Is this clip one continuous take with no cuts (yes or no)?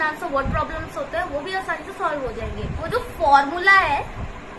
no